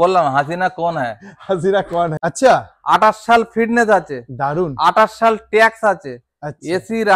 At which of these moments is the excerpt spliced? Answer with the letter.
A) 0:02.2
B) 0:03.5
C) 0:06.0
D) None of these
A